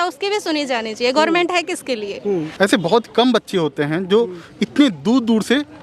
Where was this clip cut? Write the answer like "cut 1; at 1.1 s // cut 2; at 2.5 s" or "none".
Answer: cut 1; at 2.5 s